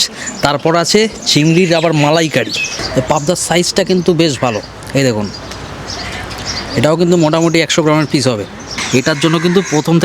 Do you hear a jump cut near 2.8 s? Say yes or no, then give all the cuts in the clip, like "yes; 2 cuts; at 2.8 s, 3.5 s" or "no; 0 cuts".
yes; 2 cuts; at 2.8 s, 8.8 s